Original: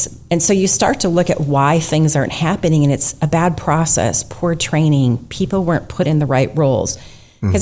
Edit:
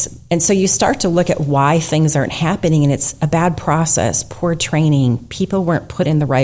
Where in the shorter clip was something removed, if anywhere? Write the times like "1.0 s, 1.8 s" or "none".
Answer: none